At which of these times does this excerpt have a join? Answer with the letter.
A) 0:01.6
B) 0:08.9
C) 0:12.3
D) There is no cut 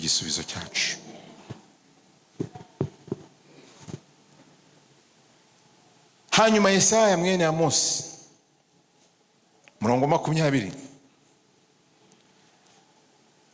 D